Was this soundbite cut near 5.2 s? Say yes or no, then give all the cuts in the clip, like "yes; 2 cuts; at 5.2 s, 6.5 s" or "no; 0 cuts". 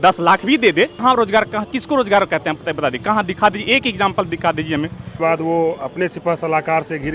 yes; 2 cuts; at 1.0 s, 5.2 s